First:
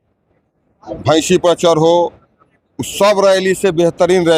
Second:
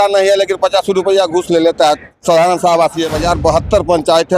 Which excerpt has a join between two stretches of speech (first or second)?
second